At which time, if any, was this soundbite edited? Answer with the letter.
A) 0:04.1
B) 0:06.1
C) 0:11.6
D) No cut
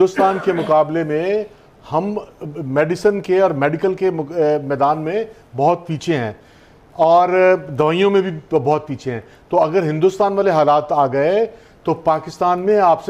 D